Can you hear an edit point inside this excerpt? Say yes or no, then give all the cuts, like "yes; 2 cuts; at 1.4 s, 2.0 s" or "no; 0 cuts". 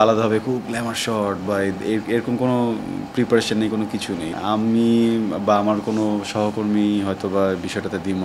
yes; 1 cut; at 4.2 s